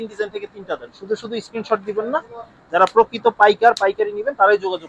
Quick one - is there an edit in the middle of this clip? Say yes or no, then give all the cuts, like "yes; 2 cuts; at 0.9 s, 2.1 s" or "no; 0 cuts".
no; 0 cuts